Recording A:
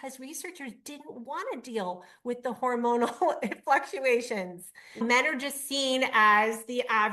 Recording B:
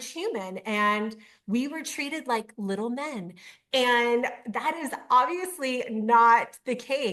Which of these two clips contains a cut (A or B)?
A